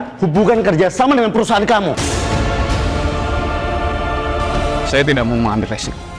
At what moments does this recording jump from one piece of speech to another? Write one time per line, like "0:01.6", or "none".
0:04.9

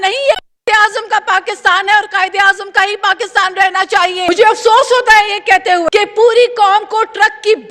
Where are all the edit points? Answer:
0:04.3
0:05.8

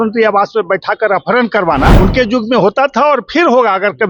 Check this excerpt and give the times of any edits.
0:01.9

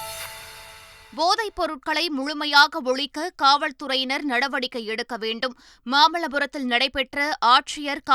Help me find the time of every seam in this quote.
0:01.0

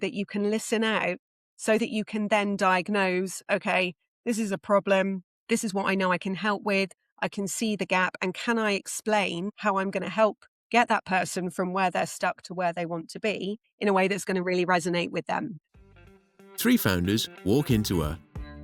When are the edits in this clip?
0:15.7

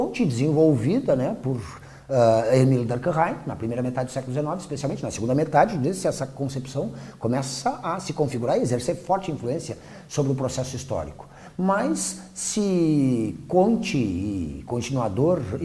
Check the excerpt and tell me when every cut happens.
0:02.8

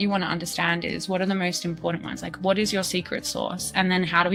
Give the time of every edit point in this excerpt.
none

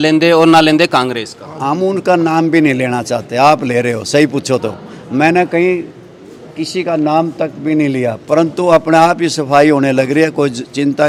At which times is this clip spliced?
none

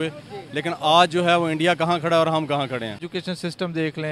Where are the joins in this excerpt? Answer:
0:03.0

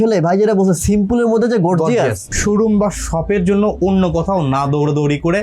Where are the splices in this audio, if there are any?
0:02.2

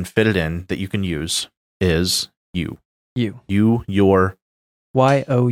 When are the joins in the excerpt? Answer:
none

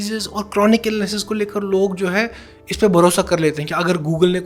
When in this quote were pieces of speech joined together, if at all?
none

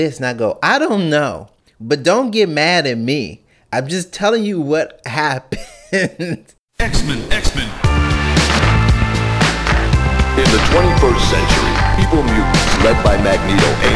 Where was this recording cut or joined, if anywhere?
0:06.5

